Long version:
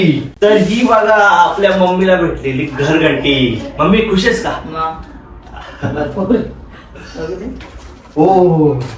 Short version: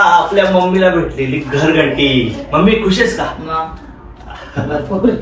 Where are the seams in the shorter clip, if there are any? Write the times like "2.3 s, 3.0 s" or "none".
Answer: none